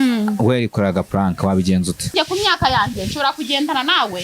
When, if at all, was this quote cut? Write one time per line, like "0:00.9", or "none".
0:02.1